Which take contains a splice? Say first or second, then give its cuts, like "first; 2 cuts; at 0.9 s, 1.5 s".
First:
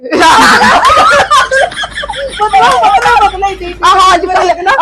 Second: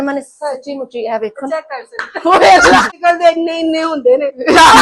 second; 1 cut; at 2.9 s